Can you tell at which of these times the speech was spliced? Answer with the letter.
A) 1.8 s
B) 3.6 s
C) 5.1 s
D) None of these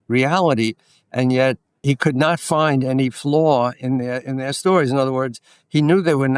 A